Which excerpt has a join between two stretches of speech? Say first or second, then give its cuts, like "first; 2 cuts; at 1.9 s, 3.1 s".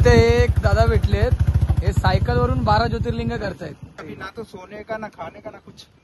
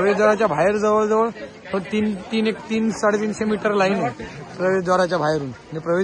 first; 1 cut; at 4.0 s